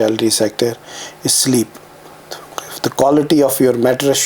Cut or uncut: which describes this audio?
uncut